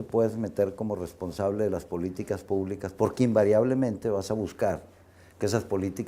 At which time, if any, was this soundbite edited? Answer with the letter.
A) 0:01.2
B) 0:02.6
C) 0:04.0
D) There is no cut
B